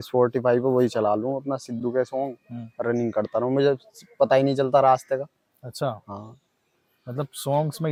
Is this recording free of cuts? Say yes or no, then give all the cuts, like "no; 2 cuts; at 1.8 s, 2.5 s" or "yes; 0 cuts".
yes; 0 cuts